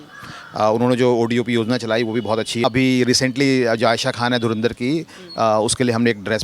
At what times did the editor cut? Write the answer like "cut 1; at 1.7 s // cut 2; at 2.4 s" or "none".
cut 1; at 2.6 s